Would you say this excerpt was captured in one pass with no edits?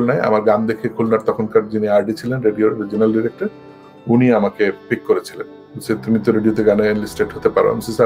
yes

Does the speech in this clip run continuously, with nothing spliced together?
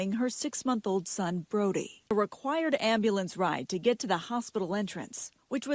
no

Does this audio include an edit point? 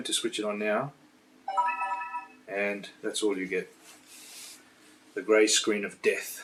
no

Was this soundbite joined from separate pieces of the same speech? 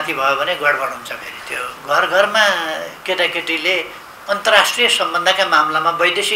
yes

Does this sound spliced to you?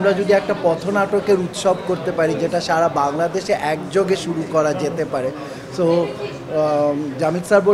no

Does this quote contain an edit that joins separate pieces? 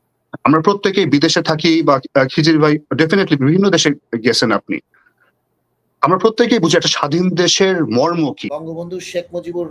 yes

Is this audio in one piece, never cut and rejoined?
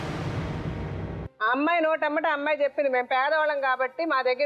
no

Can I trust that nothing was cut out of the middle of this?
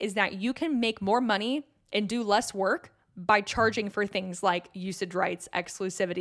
yes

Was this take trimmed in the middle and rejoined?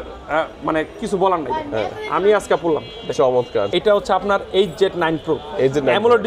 yes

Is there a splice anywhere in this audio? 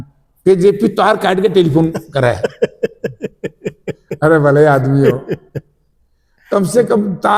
no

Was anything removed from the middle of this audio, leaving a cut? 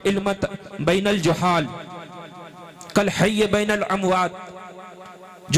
no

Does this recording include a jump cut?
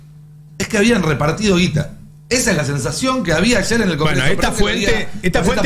no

